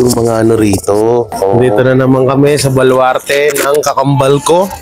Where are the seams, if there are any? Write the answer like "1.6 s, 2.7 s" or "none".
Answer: 1.6 s